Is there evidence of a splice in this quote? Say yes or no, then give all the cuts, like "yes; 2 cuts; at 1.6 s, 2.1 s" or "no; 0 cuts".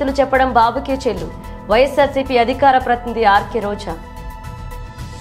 yes; 1 cut; at 4.0 s